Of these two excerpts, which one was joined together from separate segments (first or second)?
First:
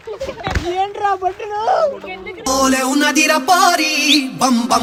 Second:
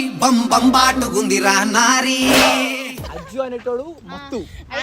second